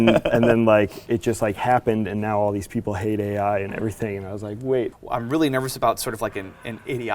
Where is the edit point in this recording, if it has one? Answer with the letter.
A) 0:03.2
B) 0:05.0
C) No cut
B